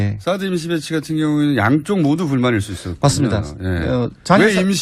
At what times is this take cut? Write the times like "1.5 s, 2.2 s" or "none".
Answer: none